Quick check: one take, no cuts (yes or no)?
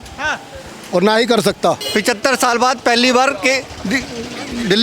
no